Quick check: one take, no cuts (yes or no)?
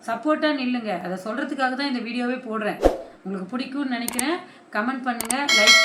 yes